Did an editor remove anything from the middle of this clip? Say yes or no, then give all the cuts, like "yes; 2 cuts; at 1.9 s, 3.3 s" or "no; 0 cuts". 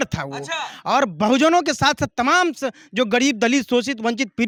no; 0 cuts